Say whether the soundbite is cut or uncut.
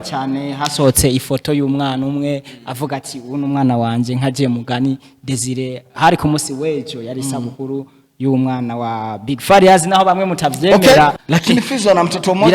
cut